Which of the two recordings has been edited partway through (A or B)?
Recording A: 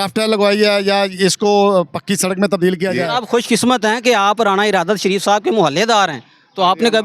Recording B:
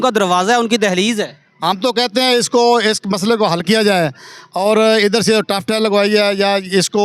A